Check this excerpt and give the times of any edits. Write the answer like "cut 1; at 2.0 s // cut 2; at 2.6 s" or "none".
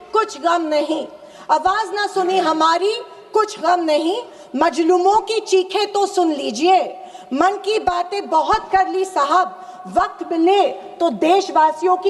none